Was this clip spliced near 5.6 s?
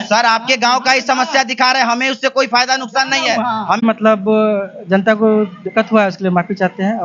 no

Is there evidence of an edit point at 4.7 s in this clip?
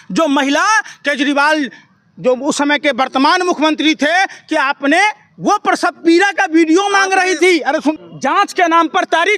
no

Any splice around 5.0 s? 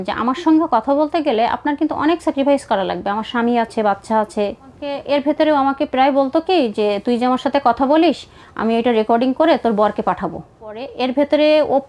yes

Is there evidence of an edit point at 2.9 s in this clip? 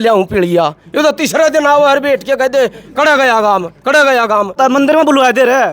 no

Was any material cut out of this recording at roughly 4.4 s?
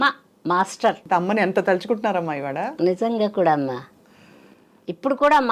no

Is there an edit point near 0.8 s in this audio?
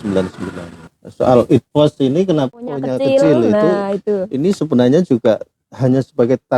yes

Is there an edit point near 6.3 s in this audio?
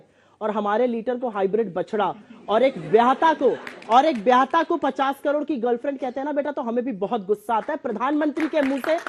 no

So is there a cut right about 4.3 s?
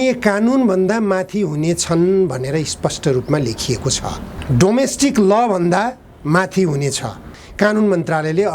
yes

